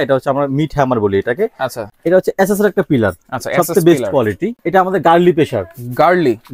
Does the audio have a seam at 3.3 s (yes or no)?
no